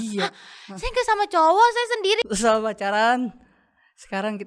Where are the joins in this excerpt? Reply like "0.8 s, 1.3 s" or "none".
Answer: 2.2 s

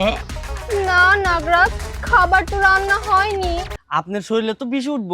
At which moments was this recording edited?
3.6 s

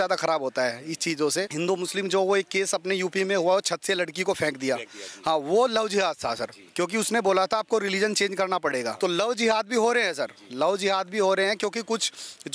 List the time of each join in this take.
1.5 s, 8.9 s

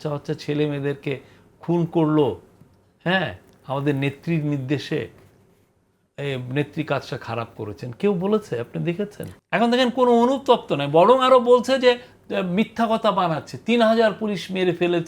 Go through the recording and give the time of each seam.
9.3 s

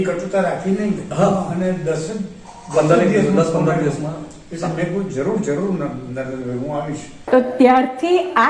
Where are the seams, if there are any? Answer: 7.1 s

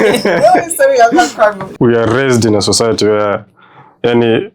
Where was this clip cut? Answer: 1.7 s

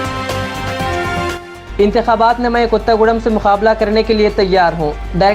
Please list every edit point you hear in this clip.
1.5 s

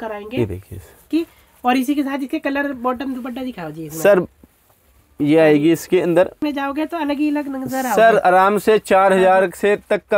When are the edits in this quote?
1.1 s, 6.4 s

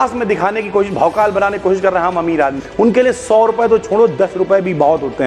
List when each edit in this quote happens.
2.6 s

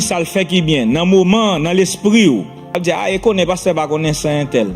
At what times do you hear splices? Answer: 2.6 s

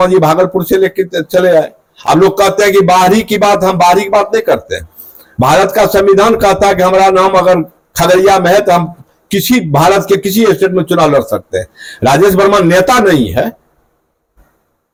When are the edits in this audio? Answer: none

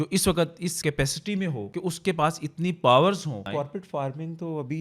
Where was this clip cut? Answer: 0.8 s, 1.7 s, 3.5 s

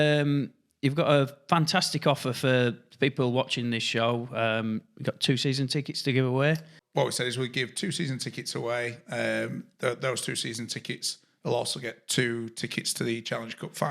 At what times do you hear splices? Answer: 6.8 s

